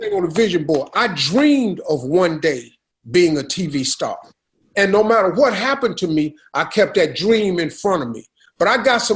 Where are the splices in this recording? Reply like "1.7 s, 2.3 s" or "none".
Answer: none

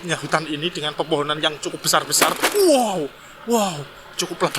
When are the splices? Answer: none

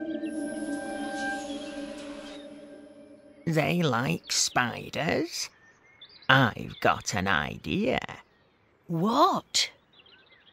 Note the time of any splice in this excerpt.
none

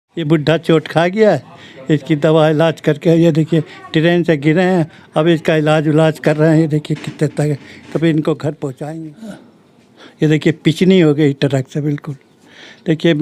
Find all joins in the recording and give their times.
8.8 s

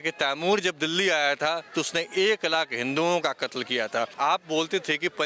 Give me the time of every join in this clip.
4.1 s

